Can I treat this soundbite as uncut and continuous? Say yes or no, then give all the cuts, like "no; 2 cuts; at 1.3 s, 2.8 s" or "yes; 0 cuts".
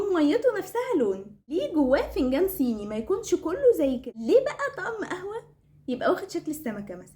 no; 2 cuts; at 1.4 s, 4.1 s